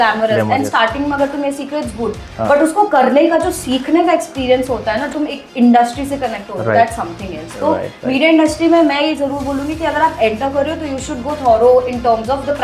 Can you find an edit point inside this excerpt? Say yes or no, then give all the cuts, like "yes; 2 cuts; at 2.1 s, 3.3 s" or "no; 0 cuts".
yes; 1 cut; at 5.1 s